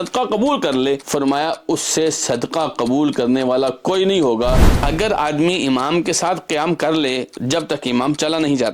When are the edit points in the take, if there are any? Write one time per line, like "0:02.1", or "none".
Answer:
0:01.0
0:04.7